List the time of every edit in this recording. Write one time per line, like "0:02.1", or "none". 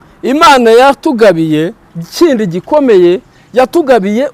none